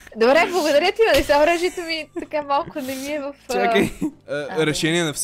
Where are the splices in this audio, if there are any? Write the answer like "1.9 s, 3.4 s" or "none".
4.2 s